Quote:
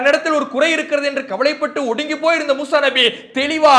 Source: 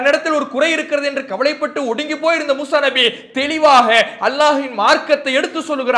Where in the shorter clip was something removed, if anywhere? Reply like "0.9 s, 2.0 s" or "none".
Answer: none